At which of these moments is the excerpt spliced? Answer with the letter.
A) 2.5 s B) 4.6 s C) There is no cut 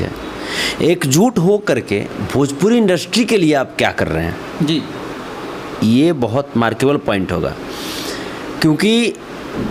C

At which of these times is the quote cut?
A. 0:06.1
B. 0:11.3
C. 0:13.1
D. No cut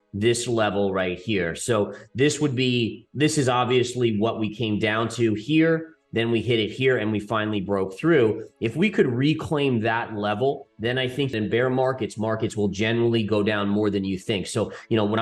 B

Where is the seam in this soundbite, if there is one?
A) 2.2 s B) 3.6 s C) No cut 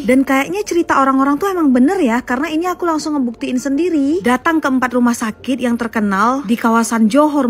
C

